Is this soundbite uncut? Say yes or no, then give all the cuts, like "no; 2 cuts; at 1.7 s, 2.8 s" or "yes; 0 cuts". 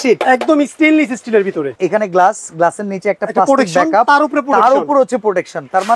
no; 1 cut; at 1.7 s